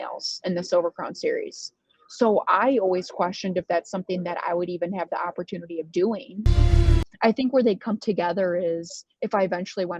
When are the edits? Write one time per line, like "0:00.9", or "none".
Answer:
0:06.7